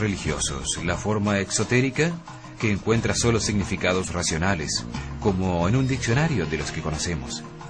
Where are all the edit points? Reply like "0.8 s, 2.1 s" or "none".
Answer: 4.8 s